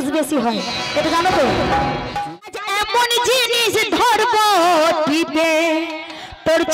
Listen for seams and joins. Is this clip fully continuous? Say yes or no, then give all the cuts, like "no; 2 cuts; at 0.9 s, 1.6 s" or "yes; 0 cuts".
no; 1 cut; at 2.1 s